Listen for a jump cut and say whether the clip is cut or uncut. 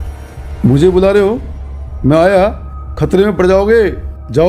uncut